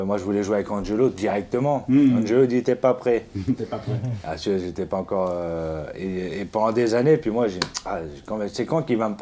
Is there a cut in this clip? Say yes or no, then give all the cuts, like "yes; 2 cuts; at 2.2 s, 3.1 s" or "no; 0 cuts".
no; 0 cuts